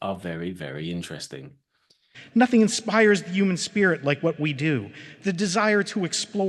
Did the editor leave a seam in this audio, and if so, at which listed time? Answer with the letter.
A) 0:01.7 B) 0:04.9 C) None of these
A